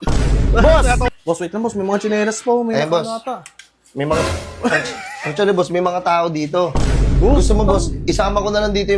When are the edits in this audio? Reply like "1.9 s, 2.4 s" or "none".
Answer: 1.1 s